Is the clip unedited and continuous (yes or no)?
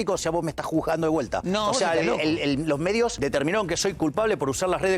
no